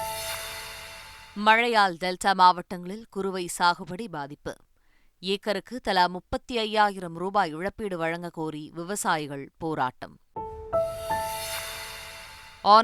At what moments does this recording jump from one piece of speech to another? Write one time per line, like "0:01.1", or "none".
none

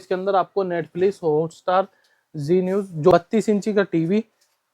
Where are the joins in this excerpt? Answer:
0:03.1

